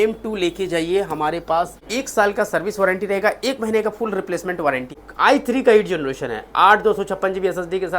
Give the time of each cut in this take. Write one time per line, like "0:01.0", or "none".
0:01.8
0:05.0